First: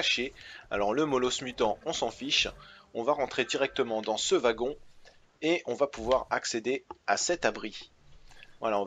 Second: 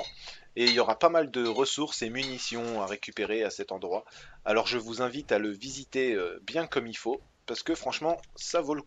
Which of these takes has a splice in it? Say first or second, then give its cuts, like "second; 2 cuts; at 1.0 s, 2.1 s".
second; 1 cut; at 2.7 s